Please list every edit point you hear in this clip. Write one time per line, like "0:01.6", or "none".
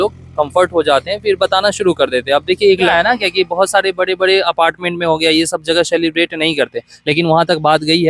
0:02.9